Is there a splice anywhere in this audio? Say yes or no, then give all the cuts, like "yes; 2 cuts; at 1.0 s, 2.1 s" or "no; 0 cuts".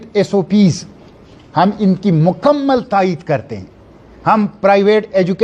no; 0 cuts